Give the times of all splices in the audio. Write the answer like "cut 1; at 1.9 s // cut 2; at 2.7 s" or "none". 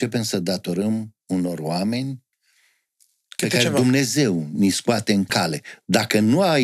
cut 1; at 5.3 s